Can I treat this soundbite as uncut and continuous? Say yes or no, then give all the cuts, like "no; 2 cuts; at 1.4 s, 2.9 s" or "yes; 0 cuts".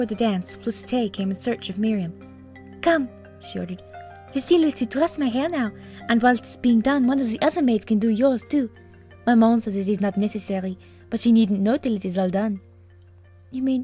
no; 1 cut; at 3.0 s